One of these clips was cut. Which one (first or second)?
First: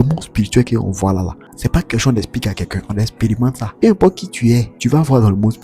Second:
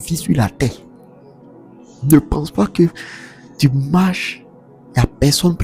first